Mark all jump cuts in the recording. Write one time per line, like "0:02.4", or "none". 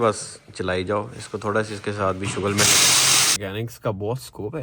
0:03.4